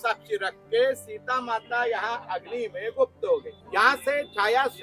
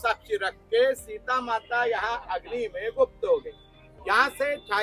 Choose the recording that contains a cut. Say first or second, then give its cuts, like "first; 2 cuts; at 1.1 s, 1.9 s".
first; 1 cut; at 3.6 s